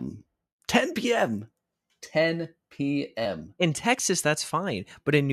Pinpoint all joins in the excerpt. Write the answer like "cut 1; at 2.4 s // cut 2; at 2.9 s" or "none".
none